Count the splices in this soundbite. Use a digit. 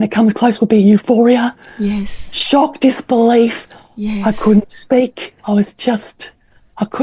1